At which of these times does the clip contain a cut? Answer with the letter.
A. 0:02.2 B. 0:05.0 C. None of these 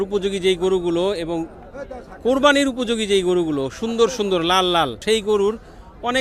B